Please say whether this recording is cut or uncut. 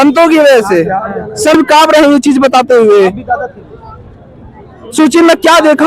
cut